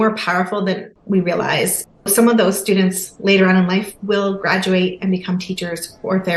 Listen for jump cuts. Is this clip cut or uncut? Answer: cut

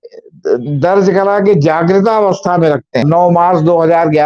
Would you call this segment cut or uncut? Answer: cut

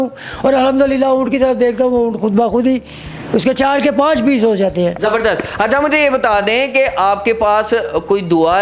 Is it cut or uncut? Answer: uncut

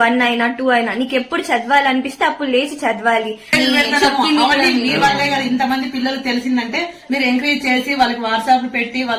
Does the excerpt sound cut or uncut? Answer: cut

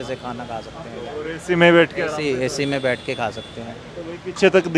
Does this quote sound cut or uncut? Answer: uncut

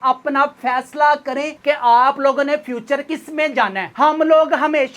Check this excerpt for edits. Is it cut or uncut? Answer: cut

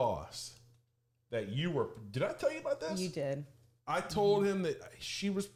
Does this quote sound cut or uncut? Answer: uncut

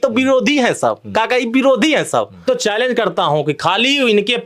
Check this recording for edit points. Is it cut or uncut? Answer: cut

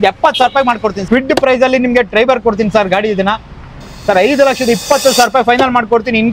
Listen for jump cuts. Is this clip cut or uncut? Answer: cut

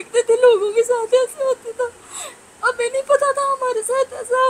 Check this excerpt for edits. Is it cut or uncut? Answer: uncut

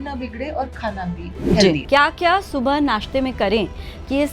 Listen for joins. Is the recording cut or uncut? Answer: cut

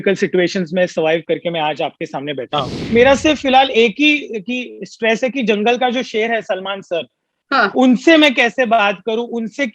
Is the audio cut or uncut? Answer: cut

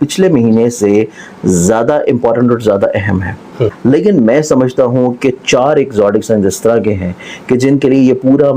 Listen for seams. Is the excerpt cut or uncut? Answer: cut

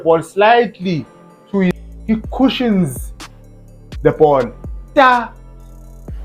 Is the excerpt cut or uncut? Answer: cut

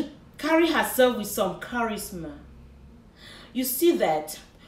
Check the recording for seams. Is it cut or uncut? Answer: uncut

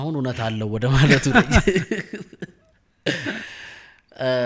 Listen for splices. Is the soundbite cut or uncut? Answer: uncut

